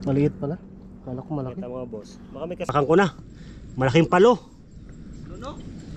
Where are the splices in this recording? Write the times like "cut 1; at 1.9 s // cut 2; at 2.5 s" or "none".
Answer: cut 1; at 2.7 s